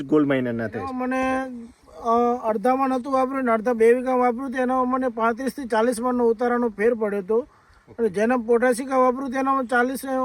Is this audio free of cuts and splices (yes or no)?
no